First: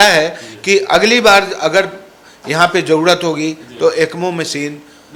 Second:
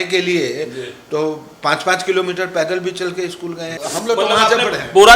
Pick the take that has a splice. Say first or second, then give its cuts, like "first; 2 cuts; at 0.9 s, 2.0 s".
second; 1 cut; at 3.7 s